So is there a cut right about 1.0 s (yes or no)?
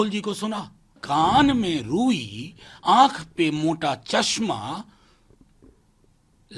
yes